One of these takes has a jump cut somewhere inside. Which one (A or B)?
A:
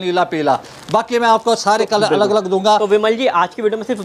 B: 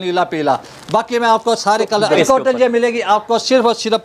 B